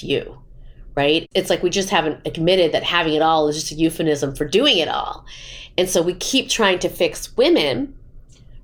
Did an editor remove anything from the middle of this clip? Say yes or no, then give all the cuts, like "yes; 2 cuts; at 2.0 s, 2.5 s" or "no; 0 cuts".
no; 0 cuts